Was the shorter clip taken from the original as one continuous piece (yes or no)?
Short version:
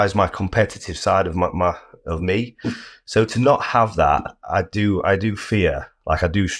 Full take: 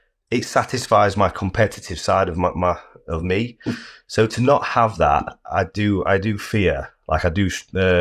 yes